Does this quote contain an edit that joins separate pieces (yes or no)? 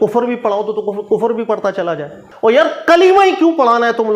yes